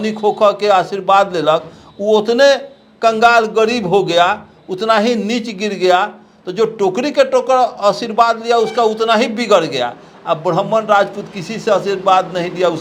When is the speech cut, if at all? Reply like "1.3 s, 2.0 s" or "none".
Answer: none